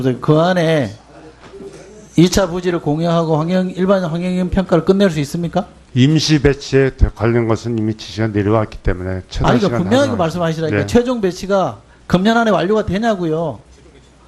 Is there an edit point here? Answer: no; 0 cuts

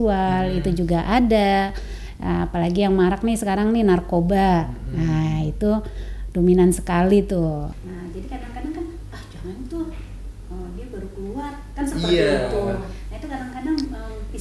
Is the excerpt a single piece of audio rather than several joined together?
no; 1 cut; at 7.8 s

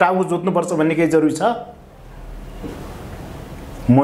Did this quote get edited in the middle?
no; 0 cuts

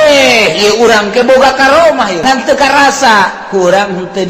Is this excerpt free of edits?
no; 1 cut; at 2.2 s

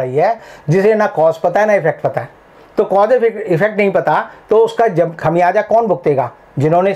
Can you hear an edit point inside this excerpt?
no; 0 cuts

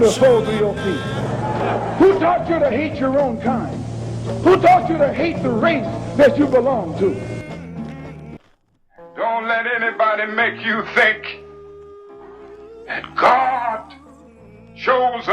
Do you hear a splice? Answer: yes; 1 cut; at 8.4 s

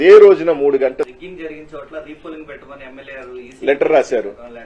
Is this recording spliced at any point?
yes; 1 cut; at 1.1 s

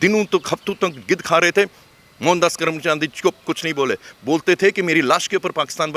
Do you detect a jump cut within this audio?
no; 0 cuts

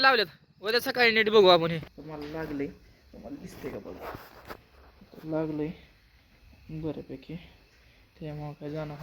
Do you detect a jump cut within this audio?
yes; 1 cut; at 1.9 s

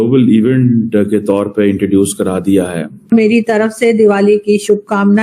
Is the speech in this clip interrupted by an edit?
yes; 1 cut; at 3.1 s

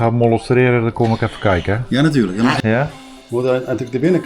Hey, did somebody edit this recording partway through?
yes; 1 cut; at 2.6 s

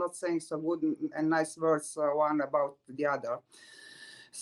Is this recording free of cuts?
yes; 0 cuts

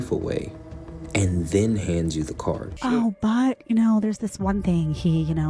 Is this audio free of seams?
no; 1 cut; at 2.7 s

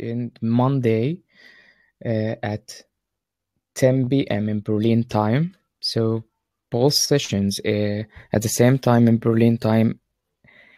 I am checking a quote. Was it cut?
no; 0 cuts

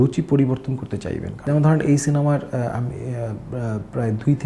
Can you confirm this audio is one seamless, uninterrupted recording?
yes; 0 cuts

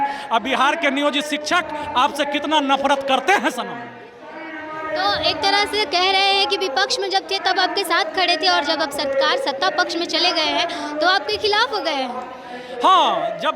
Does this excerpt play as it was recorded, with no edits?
yes; 0 cuts

